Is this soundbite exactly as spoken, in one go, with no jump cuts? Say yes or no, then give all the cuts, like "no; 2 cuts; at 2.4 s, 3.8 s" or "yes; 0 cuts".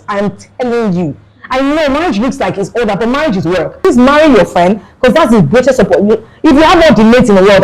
no; 1 cut; at 3.8 s